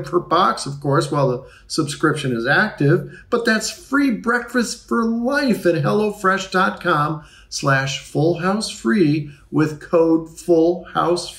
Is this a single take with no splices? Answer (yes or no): yes